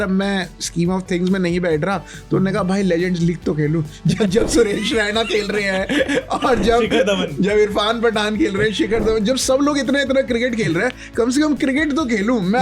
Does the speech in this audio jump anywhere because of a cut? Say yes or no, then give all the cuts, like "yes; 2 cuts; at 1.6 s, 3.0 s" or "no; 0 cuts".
no; 0 cuts